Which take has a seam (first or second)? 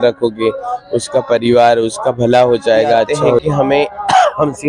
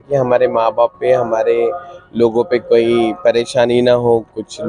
first